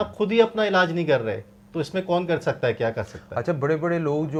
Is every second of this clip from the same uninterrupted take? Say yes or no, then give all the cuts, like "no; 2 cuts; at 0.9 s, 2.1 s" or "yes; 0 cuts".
yes; 0 cuts